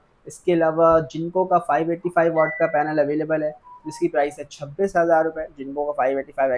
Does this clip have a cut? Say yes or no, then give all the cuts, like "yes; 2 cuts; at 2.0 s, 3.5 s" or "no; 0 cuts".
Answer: no; 0 cuts